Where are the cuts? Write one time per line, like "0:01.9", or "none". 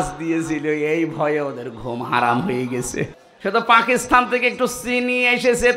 0:03.2